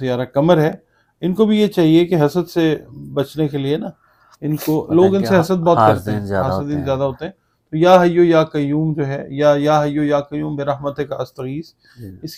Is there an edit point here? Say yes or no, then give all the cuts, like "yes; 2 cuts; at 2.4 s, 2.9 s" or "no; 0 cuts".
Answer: no; 0 cuts